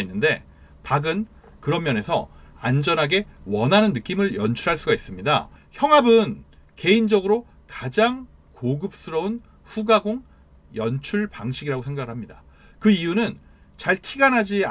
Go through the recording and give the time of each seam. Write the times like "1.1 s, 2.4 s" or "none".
5.6 s